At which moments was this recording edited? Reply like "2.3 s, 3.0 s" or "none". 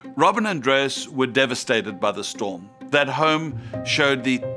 none